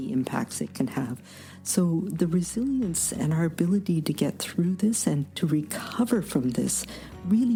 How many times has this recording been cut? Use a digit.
0